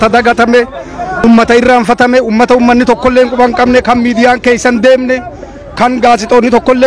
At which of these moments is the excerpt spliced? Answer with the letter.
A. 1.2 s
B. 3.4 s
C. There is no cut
A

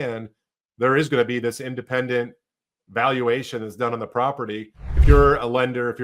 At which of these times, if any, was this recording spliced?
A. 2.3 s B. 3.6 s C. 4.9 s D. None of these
C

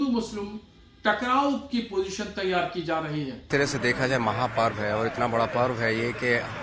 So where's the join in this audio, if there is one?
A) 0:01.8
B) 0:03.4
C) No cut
B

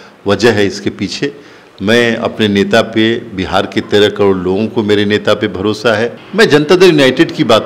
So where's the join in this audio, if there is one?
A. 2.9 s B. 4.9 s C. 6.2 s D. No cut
C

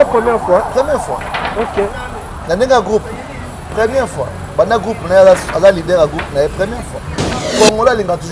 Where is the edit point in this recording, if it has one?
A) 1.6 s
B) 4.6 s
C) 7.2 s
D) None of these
C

